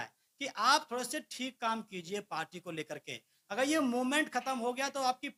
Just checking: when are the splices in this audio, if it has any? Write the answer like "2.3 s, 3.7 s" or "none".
none